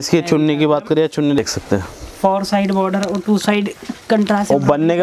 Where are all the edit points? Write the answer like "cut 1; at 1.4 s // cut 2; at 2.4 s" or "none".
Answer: cut 1; at 1.4 s